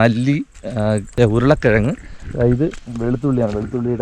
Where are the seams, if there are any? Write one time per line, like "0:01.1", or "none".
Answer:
0:01.1